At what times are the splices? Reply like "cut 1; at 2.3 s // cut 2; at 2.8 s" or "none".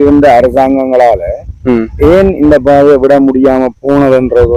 none